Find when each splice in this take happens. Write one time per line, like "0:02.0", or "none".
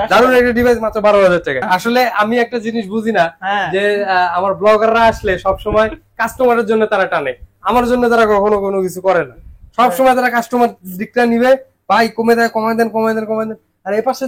0:01.6

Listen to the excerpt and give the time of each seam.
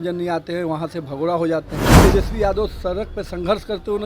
0:02.0

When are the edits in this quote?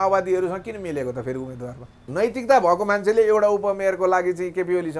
0:02.0

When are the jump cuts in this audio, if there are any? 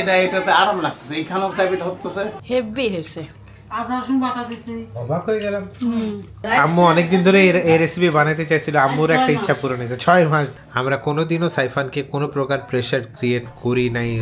0:02.4
0:06.3
0:10.5

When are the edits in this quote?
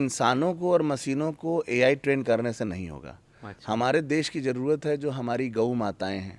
none

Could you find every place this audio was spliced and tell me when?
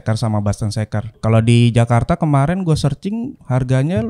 0:01.1

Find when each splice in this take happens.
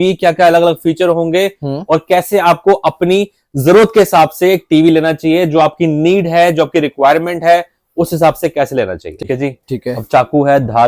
0:09.1

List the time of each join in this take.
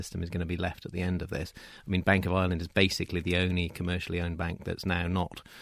none

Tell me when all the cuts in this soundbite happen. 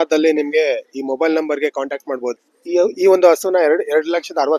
0:02.4

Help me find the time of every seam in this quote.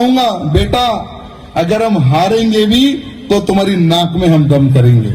none

